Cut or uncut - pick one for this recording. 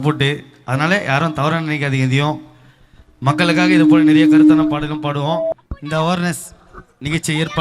cut